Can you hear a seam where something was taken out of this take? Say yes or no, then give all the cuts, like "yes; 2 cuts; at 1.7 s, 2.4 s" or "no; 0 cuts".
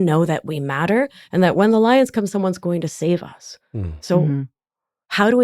no; 0 cuts